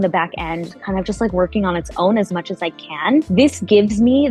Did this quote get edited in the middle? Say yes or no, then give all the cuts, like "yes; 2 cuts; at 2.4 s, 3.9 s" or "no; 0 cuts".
no; 0 cuts